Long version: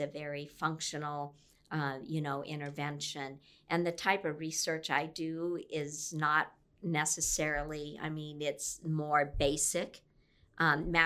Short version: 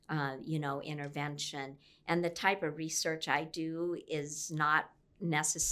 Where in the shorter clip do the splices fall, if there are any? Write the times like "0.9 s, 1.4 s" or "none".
none